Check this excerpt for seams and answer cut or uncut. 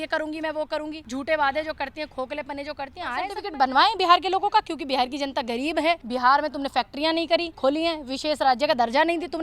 cut